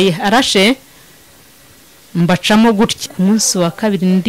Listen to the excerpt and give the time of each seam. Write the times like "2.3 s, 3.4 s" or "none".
3.0 s